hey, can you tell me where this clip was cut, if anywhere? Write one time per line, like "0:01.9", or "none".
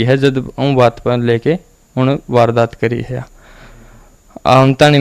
none